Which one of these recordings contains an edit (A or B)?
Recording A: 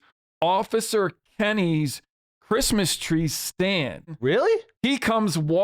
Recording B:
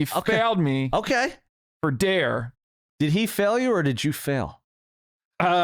A